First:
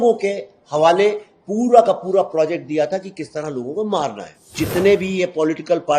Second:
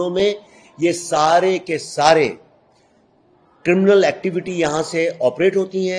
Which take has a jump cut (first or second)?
first